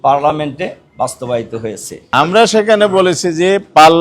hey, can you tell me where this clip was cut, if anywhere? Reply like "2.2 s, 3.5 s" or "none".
1.9 s